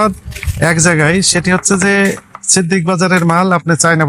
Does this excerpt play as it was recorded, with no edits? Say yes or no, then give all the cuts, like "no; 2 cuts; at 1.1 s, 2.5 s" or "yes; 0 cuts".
yes; 0 cuts